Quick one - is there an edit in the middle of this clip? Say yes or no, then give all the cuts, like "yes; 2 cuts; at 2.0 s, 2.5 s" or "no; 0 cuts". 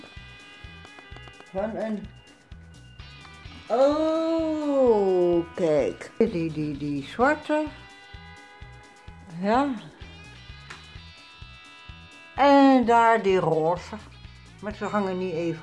yes; 5 cuts; at 2.1 s, 3.5 s, 6.2 s, 10.1 s, 12.3 s